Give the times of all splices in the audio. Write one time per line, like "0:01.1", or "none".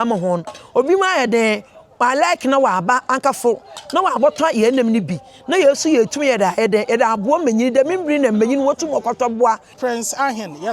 0:09.8